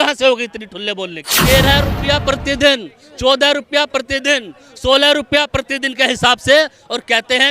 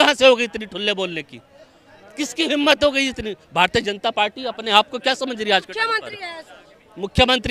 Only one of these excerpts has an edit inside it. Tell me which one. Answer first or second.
first